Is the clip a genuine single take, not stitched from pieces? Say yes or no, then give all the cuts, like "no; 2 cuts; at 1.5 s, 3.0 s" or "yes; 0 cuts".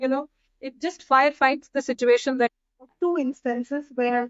no; 1 cut; at 2.5 s